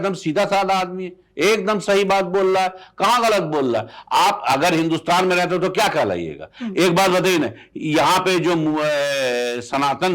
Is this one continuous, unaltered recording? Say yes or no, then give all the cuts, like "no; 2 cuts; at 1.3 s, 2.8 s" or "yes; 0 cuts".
yes; 0 cuts